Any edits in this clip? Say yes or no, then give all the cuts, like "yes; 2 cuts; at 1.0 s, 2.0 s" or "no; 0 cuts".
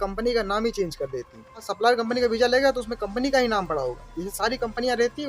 yes; 1 cut; at 1.7 s